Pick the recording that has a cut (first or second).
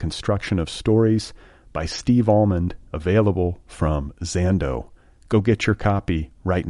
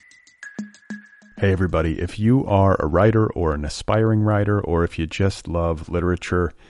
second